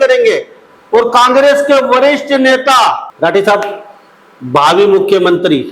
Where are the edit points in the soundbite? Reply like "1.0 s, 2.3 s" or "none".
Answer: 3.1 s